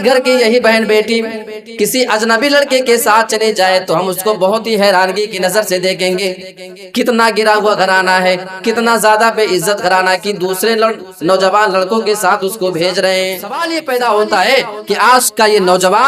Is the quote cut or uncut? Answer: cut